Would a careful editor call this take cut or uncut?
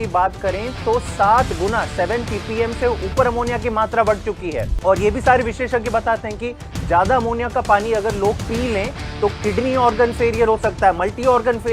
cut